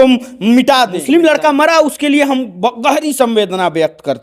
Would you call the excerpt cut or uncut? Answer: cut